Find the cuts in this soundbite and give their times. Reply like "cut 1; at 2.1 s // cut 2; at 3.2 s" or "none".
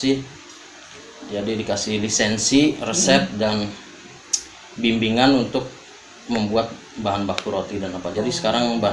none